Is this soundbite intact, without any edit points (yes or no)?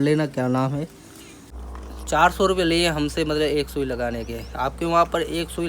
no